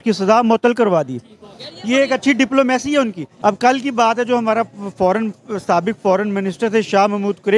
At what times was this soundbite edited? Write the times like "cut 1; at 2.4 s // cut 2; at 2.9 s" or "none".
cut 1; at 3.2 s